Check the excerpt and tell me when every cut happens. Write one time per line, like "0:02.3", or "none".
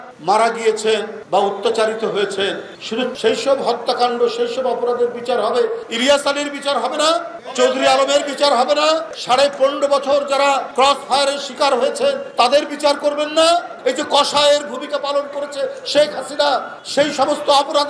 0:03.1
0:13.8